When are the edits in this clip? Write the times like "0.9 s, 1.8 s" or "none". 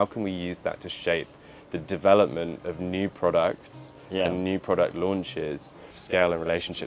6.0 s